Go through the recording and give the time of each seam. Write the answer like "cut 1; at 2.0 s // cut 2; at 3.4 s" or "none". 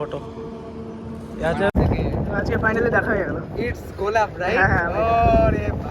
cut 1; at 1.7 s